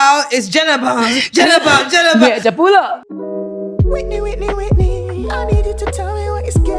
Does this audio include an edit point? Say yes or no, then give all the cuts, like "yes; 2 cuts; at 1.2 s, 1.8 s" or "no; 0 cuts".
yes; 1 cut; at 2.9 s